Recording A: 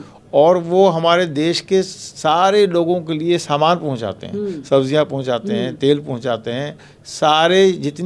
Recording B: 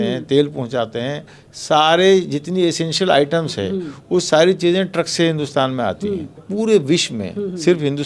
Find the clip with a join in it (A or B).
B